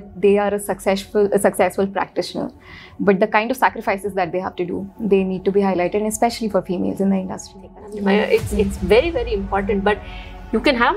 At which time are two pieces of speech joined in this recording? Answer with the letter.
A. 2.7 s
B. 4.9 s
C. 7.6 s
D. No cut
C